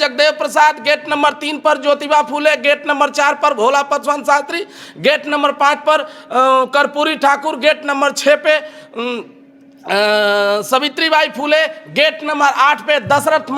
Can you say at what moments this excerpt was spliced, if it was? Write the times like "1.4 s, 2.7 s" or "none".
none